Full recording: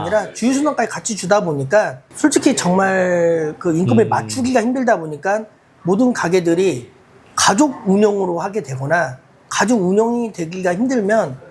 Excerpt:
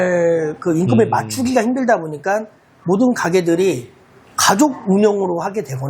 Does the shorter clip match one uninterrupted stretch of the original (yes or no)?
yes